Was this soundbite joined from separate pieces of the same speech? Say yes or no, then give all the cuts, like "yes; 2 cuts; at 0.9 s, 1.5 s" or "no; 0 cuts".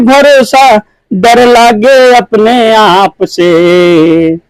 no; 0 cuts